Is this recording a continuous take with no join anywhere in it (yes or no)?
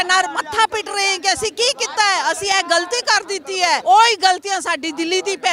no